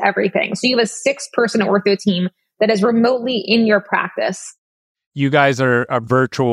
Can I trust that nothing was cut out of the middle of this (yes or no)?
no